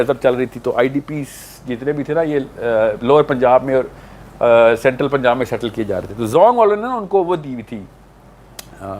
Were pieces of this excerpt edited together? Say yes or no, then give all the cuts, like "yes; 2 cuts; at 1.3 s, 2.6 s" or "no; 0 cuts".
no; 0 cuts